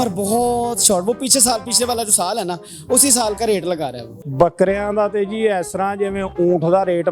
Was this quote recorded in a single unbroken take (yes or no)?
no